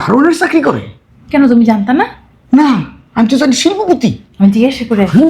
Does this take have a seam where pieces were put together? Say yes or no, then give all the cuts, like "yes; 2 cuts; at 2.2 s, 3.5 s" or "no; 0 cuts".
no; 0 cuts